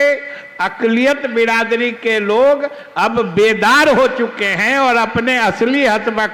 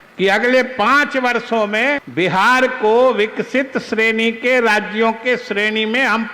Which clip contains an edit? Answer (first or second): second